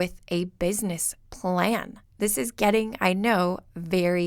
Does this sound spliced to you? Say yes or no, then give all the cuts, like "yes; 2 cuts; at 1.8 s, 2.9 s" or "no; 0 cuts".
yes; 1 cut; at 2.0 s